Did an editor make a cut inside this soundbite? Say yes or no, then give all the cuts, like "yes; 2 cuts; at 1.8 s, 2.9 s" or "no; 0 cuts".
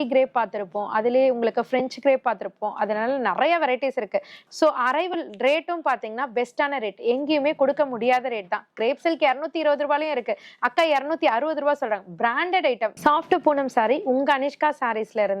yes; 2 cuts; at 4.4 s, 12.9 s